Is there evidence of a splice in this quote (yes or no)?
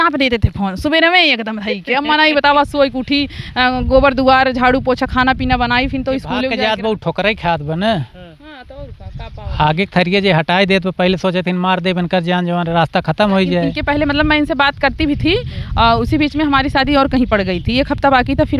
yes